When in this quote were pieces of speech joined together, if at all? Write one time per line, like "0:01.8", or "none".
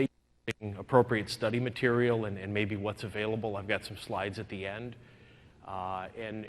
0:01.3